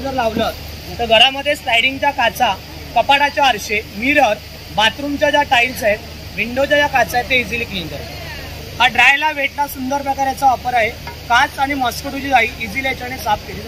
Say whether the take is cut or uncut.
uncut